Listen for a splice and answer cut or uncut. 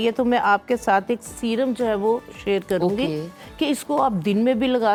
uncut